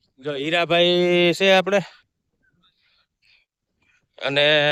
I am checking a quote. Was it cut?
no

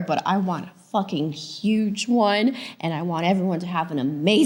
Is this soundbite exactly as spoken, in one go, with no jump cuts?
yes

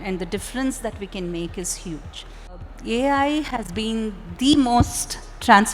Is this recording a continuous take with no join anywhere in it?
no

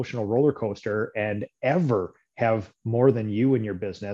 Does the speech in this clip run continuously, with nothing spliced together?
yes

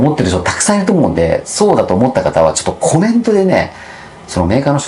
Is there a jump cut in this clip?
no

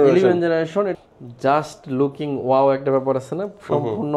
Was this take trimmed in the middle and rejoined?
yes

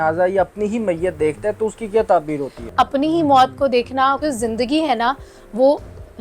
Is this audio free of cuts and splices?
no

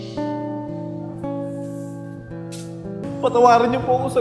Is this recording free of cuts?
no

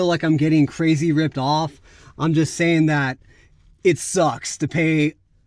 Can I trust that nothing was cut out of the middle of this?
yes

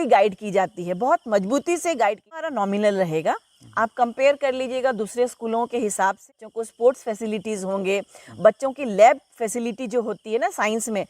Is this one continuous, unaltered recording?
no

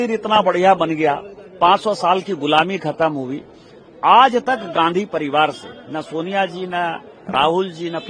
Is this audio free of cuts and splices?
yes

